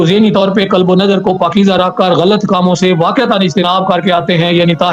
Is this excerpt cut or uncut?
uncut